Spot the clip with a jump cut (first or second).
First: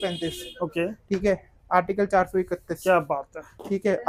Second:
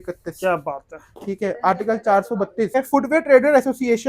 second